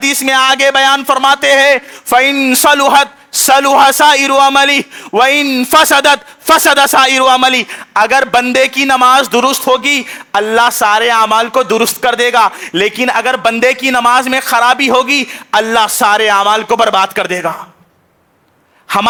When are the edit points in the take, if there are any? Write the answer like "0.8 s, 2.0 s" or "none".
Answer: none